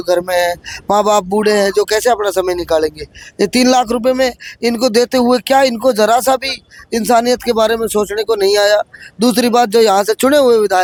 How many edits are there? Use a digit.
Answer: 0